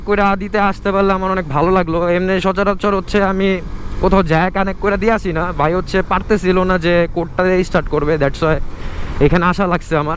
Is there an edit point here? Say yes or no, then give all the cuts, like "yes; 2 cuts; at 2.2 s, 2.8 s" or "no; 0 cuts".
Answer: no; 0 cuts